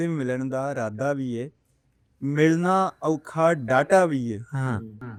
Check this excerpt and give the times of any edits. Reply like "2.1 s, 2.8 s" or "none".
none